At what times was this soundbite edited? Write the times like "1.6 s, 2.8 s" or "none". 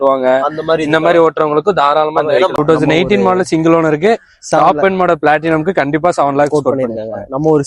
2.6 s